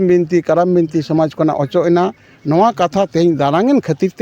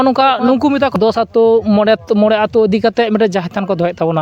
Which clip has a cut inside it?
second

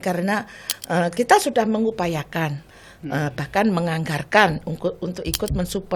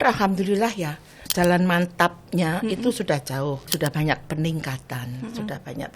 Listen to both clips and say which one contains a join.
second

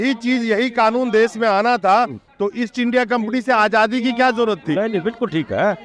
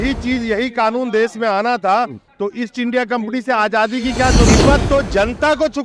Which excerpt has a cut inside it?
second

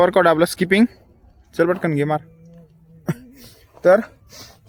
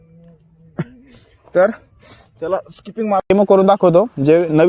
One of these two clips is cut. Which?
second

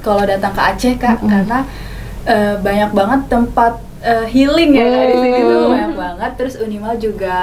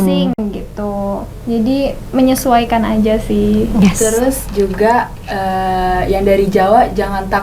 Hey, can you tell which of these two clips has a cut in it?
second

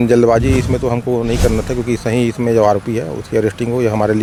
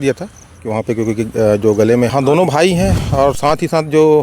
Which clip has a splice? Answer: second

